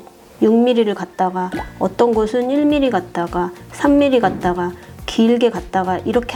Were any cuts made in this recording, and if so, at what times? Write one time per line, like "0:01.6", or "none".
none